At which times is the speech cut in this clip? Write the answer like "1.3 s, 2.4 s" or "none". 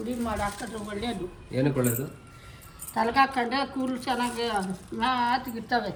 none